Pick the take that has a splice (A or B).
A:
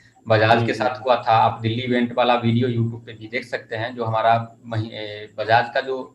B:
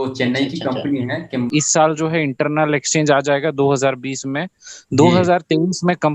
B